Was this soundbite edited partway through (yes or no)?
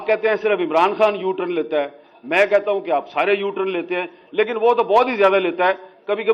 no